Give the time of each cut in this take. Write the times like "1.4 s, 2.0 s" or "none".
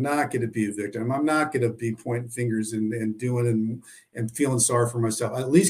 none